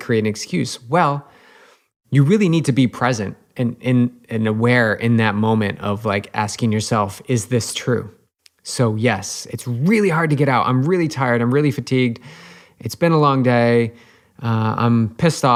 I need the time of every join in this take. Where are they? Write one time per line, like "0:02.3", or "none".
none